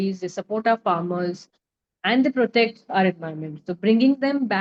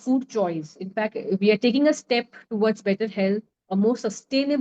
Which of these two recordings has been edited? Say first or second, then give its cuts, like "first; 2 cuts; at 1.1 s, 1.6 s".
second; 1 cut; at 3.5 s